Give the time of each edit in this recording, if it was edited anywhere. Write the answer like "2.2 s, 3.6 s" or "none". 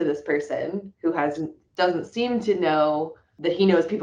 none